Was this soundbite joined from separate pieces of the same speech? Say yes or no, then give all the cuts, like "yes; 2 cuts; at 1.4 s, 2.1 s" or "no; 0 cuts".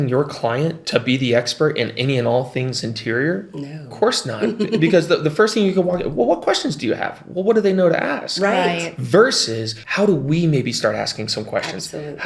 no; 0 cuts